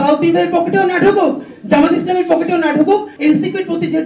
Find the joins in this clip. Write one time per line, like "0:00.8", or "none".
0:03.1